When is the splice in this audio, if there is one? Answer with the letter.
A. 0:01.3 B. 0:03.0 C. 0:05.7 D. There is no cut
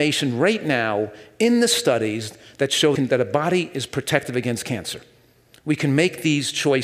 B